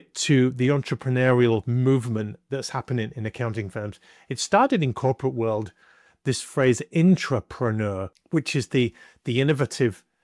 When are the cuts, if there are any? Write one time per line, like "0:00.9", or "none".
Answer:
none